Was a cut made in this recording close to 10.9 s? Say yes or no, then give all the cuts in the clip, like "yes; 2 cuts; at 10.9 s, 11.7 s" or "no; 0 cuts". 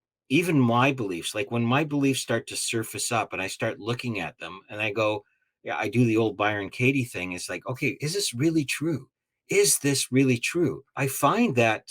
yes; 1 cut; at 10.9 s